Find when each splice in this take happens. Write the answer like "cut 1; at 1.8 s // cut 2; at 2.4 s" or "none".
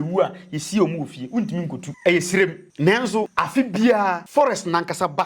cut 1; at 1.8 s // cut 2; at 2.6 s // cut 3; at 3.3 s // cut 4; at 4.2 s